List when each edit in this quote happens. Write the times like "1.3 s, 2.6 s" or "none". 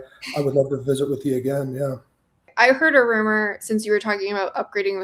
2.5 s